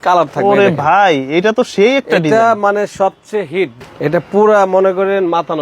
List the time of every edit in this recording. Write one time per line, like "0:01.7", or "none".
0:03.8